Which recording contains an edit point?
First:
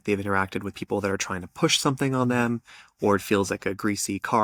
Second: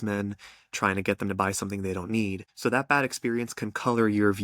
second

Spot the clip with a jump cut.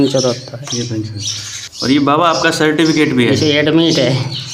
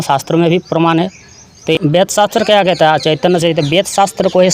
second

